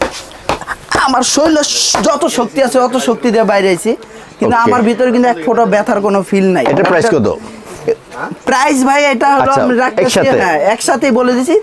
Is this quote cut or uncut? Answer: uncut